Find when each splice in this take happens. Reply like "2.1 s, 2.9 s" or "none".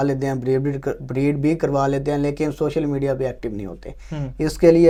none